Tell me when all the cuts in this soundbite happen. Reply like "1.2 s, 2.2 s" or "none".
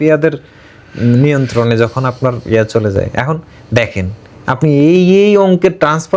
none